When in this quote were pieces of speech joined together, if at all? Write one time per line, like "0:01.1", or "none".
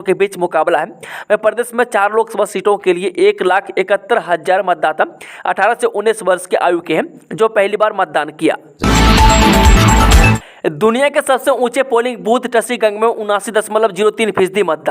0:08.7
0:10.5

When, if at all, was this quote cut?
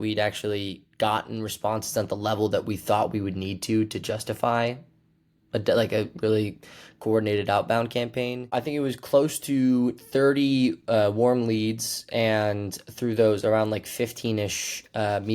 0:08.5

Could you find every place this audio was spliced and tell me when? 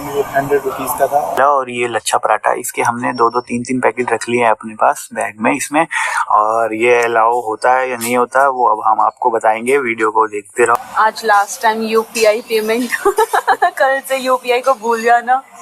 0:01.4
0:10.8

